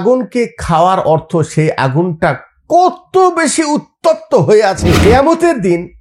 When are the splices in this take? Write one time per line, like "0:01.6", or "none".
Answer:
0:05.0